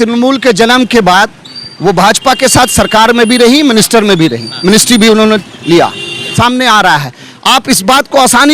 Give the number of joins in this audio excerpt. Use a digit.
1